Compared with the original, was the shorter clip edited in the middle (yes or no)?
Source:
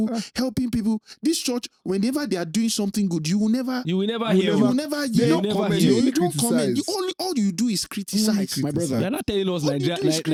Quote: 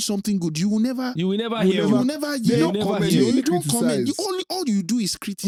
no